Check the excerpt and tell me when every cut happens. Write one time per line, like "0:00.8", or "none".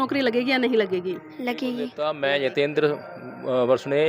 0:02.0